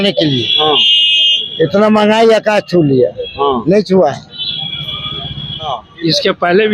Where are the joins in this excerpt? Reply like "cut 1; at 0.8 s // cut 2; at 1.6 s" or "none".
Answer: cut 1; at 5.8 s